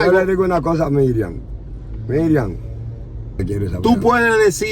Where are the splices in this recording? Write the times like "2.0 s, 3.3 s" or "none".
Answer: 3.4 s